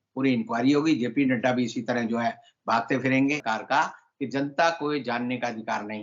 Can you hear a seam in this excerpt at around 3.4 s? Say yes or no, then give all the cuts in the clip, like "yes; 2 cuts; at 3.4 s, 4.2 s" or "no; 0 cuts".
yes; 1 cut; at 3.4 s